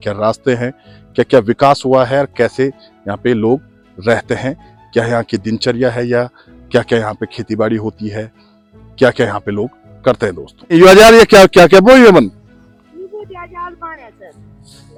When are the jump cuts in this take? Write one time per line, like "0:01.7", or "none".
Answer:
none